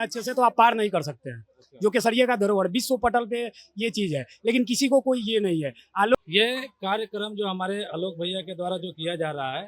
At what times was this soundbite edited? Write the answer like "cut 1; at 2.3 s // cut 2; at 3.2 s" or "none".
cut 1; at 6.1 s